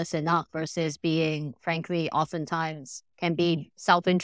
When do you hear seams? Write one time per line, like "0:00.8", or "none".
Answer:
none